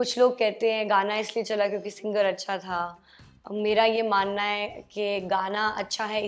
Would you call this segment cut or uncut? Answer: uncut